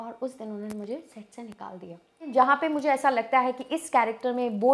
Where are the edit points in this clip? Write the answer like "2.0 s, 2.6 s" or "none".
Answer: 2.3 s